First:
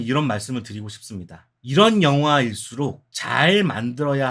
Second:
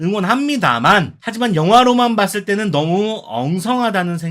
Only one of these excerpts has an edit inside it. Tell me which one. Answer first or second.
second